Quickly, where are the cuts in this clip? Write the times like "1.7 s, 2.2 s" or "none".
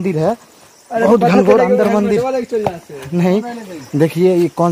none